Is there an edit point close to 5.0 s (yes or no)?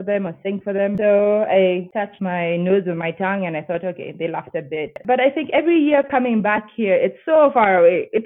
yes